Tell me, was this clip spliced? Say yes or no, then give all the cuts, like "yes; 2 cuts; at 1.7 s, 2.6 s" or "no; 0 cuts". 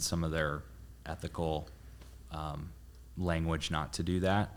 no; 0 cuts